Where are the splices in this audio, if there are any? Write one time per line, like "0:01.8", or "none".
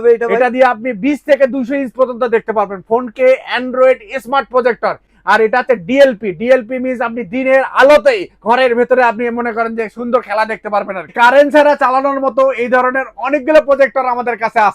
0:11.3

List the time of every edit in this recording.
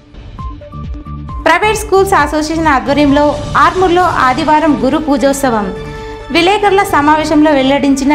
0:01.2

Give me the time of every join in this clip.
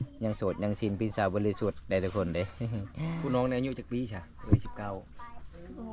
none

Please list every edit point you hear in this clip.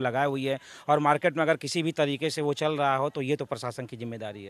none

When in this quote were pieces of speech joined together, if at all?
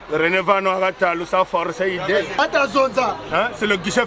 0:02.4

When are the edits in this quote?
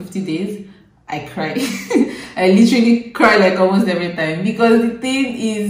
none

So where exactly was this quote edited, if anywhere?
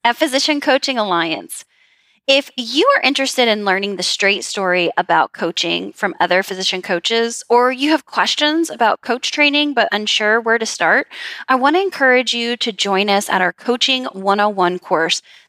none

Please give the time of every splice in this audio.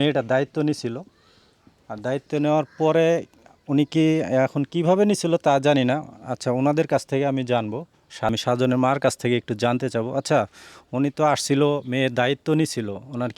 0:08.3

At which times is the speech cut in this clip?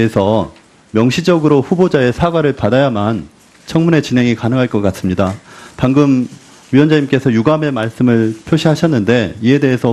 none

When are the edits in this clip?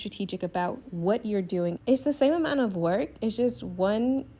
0:01.8

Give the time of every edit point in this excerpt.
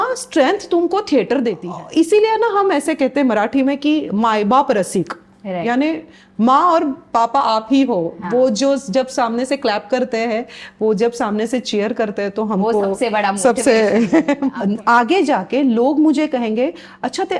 0:01.7
0:14.5

